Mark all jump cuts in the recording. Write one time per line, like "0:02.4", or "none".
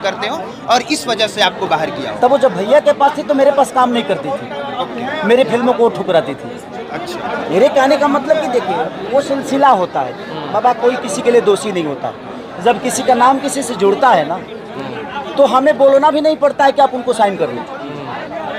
none